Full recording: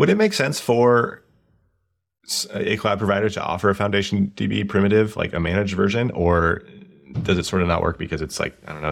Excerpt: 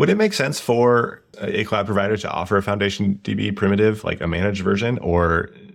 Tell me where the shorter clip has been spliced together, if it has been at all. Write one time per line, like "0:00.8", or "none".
0:01.2